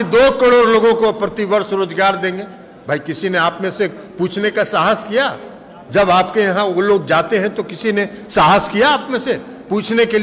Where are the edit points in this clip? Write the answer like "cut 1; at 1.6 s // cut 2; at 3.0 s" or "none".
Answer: none